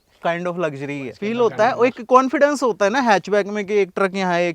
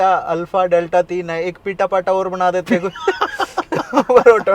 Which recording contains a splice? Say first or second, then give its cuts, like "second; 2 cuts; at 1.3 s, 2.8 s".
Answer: first; 1 cut; at 1.1 s